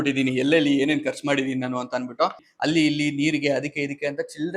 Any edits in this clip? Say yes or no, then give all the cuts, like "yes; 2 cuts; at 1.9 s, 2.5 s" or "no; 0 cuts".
yes; 1 cut; at 2.3 s